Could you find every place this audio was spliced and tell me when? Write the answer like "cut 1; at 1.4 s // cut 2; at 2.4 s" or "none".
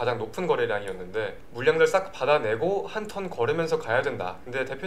none